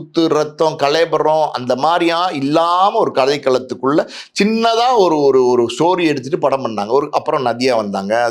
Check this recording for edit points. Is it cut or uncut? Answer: uncut